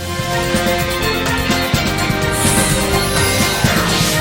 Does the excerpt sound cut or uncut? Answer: uncut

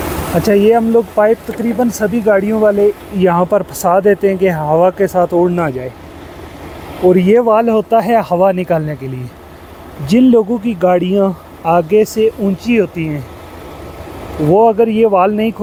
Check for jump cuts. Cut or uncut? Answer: uncut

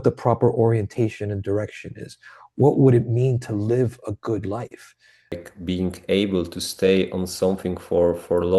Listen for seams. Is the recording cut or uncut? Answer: cut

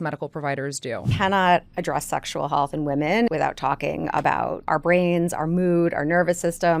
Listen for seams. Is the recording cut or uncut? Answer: cut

